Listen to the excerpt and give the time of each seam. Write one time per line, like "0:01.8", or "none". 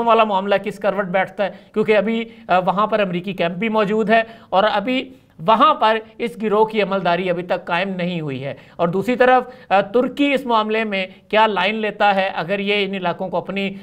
none